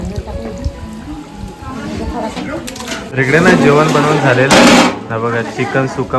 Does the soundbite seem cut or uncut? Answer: cut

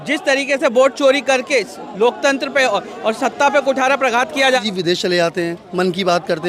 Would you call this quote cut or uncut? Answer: cut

